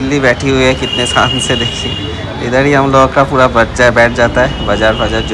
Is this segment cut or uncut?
uncut